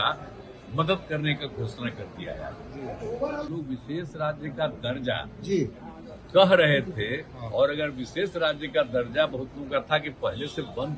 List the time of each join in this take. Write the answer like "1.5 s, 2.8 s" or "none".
3.5 s